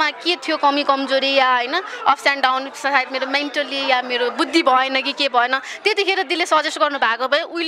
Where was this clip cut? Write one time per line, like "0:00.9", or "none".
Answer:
none